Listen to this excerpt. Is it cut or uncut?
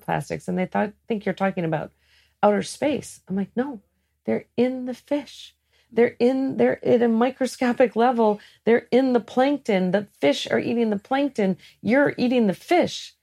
uncut